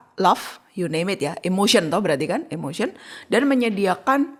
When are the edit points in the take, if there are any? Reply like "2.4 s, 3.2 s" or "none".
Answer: none